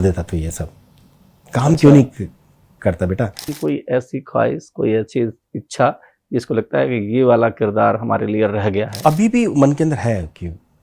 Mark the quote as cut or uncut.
cut